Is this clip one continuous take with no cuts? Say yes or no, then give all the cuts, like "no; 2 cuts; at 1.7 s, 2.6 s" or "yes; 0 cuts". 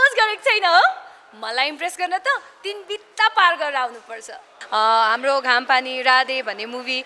no; 1 cut; at 4.6 s